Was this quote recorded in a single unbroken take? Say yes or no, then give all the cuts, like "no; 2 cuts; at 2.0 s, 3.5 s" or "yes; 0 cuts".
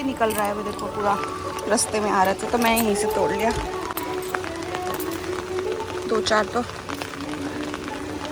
yes; 0 cuts